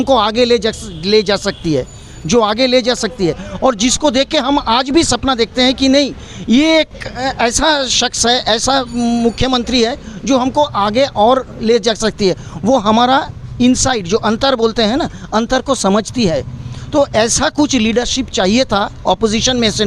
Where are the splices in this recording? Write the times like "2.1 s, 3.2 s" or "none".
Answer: none